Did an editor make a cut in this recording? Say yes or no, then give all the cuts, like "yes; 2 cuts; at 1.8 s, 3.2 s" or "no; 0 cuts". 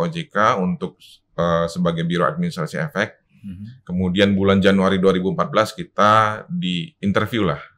no; 0 cuts